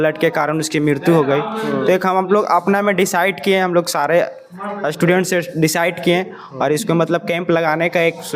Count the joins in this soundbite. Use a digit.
0